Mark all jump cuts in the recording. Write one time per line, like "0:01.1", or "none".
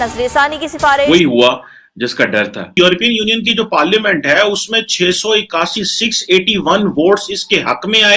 0:01.1
0:02.7